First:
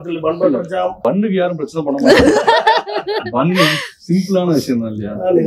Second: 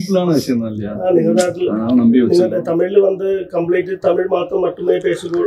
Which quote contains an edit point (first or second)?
first